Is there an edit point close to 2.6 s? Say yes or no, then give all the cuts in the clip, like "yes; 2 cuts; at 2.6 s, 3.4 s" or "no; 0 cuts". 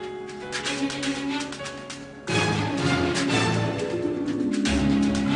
yes; 1 cut; at 2.6 s